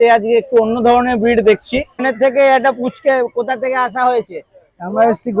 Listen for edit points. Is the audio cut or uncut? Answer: cut